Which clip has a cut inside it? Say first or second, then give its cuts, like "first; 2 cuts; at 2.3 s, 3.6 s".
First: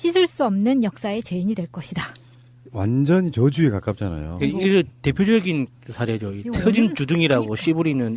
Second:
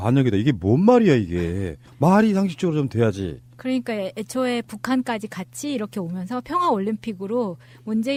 first; 1 cut; at 3.8 s